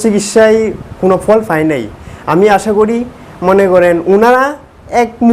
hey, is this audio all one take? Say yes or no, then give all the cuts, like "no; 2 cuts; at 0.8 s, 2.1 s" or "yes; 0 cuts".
yes; 0 cuts